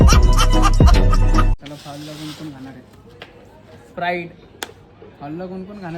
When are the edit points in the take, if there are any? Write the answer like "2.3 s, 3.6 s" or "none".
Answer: 1.6 s